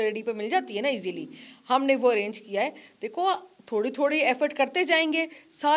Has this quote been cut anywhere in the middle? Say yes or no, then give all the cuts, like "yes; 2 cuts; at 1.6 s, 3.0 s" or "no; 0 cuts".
no; 0 cuts